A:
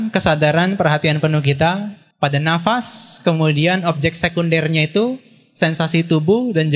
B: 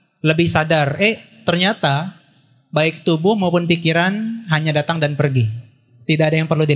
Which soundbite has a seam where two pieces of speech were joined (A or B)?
A